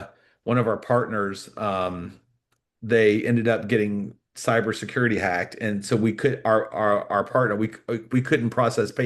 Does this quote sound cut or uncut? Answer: uncut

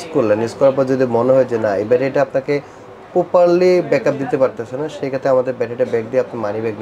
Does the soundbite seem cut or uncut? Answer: uncut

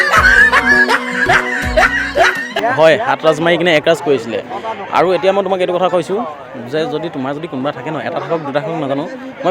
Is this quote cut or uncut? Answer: cut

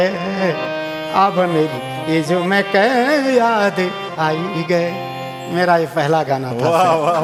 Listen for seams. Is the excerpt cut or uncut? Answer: uncut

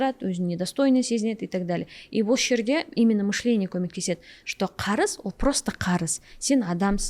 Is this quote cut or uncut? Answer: uncut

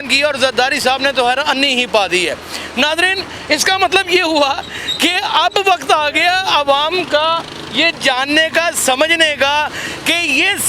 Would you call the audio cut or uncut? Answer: uncut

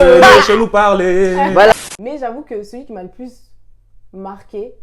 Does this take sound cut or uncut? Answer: cut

